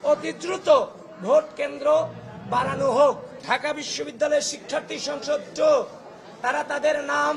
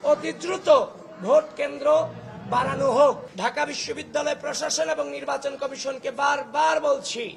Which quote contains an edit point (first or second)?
second